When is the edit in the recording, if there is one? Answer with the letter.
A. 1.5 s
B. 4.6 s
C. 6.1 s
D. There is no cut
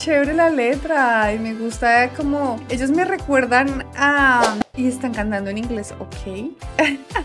B